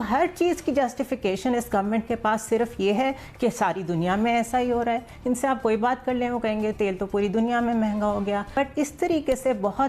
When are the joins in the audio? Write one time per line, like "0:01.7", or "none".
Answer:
0:08.6